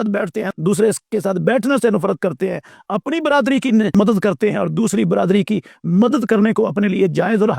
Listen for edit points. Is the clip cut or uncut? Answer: uncut